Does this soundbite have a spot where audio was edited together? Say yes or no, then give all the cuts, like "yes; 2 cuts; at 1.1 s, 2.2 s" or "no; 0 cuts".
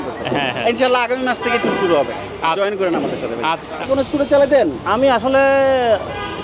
yes; 1 cut; at 3.9 s